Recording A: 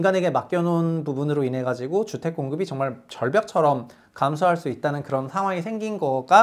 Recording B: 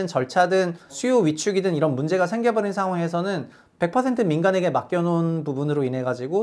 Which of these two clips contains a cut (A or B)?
B